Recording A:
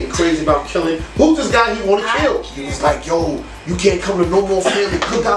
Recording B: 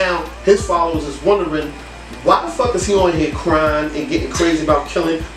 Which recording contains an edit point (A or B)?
A